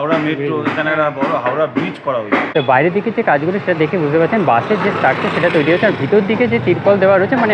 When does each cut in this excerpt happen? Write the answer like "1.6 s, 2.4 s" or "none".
2.5 s